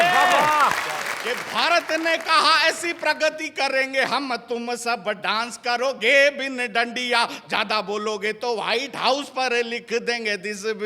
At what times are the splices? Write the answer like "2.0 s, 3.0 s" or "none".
1.1 s